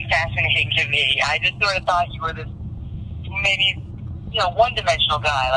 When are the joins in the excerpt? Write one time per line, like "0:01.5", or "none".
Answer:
none